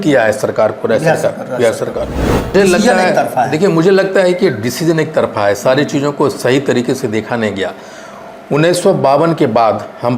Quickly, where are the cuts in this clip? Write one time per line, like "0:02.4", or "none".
0:02.5